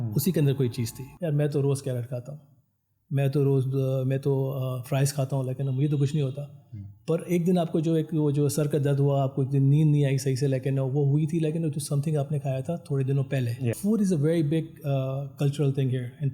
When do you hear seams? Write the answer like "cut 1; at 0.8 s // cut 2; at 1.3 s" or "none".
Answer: cut 1; at 1.0 s // cut 2; at 13.8 s

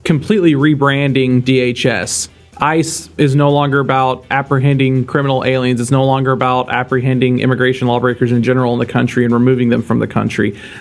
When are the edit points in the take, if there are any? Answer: none

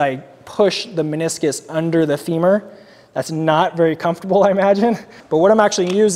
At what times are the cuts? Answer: cut 1; at 5.1 s

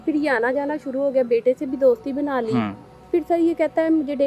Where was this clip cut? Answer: cut 1; at 3.0 s

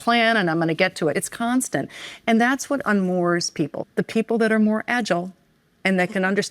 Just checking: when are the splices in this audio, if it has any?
cut 1; at 1.2 s // cut 2; at 3.8 s

